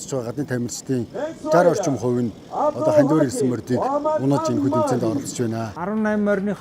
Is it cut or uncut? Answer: cut